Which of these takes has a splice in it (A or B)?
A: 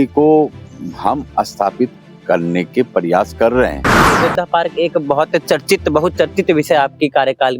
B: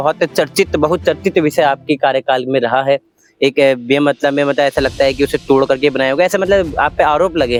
A